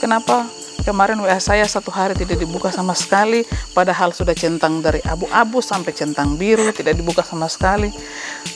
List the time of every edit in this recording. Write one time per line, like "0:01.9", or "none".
none